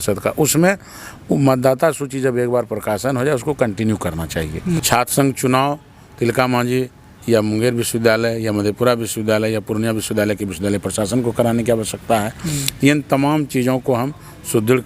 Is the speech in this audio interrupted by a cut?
yes; 1 cut; at 4.8 s

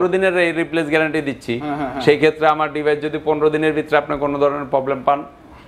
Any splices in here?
no; 0 cuts

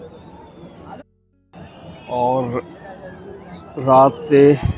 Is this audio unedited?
no; 1 cut; at 1.0 s

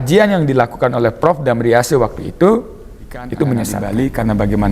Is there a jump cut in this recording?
yes; 1 cut; at 3.8 s

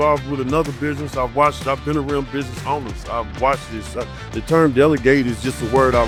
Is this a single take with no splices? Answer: yes; 0 cuts

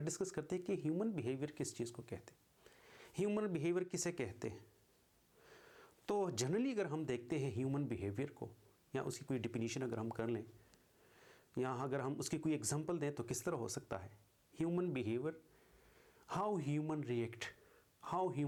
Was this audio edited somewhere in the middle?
no; 0 cuts

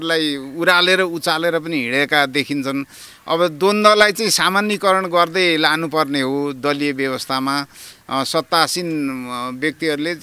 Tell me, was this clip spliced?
no; 0 cuts

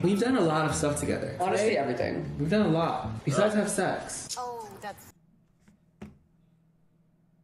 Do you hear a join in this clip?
no; 0 cuts

